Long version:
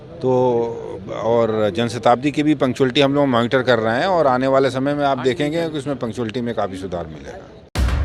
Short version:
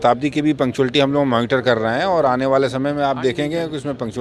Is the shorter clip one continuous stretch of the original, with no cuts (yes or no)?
yes